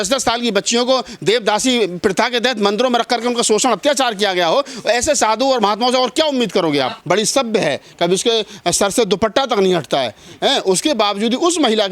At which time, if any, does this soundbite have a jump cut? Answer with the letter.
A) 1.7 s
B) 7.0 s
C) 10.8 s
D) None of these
B